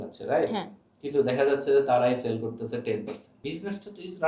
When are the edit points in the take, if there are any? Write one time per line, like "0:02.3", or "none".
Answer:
0:03.2